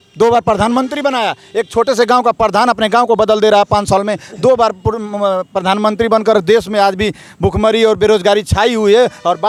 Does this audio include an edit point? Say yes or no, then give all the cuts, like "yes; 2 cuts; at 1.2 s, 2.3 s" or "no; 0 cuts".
no; 0 cuts